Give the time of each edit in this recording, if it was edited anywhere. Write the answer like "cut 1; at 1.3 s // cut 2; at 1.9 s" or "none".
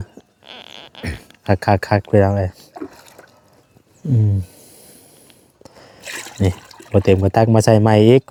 none